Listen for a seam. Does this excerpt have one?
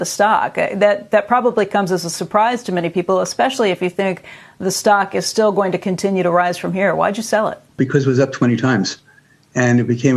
yes; 1 cut; at 7.8 s

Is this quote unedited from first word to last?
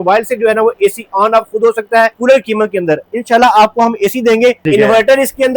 no; 2 cuts; at 2.1 s, 4.6 s

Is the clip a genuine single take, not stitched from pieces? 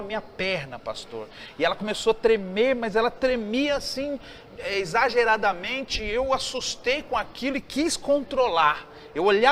yes; 0 cuts

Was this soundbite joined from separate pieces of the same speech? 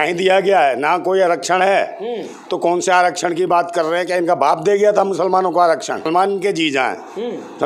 yes; 1 cut; at 6.1 s

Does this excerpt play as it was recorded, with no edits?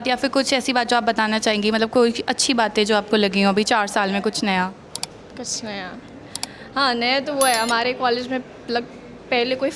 yes; 0 cuts

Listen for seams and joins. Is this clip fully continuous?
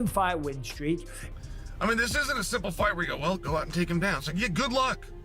no; 1 cut; at 1.2 s

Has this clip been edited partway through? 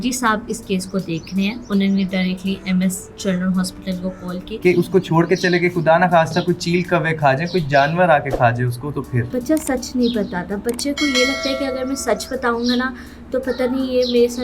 yes; 2 cuts; at 4.5 s, 9.2 s

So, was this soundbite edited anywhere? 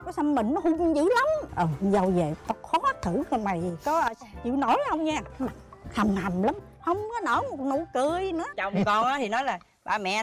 yes; 2 cuts; at 1.5 s, 8.6 s

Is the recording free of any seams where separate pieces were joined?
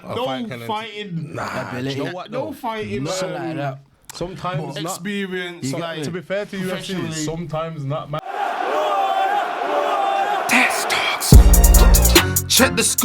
no; 1 cut; at 8.2 s

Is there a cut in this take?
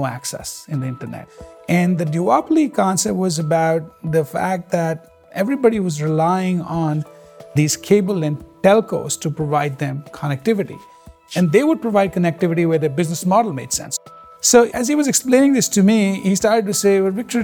yes; 2 cuts; at 1.3 s, 14.8 s

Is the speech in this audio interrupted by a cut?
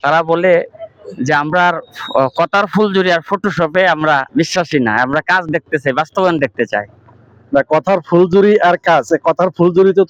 no; 0 cuts

